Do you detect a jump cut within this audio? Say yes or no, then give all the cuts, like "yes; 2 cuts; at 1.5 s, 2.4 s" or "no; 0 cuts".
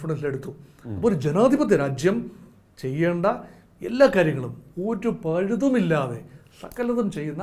no; 0 cuts